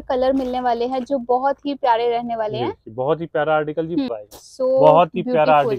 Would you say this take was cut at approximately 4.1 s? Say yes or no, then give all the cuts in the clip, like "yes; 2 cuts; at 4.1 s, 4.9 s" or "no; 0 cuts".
yes; 1 cut; at 4.1 s